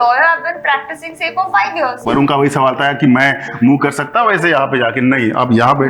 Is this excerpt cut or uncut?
cut